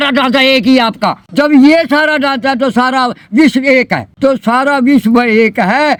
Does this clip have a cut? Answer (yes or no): no